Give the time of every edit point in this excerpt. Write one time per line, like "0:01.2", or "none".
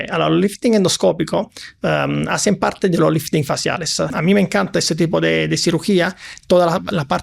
0:04.1